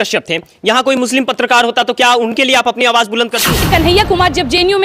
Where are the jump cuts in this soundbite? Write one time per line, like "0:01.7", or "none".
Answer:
0:03.6